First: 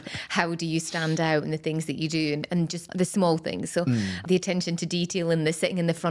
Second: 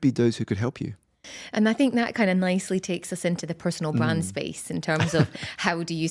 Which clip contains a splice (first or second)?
first